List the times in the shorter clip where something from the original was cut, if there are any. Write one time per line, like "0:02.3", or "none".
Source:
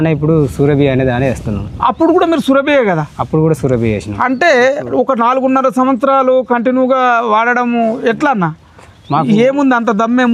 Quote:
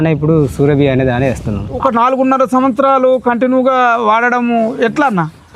0:01.8